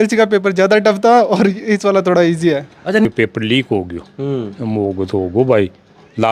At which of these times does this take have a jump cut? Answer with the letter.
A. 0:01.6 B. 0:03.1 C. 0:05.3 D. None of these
B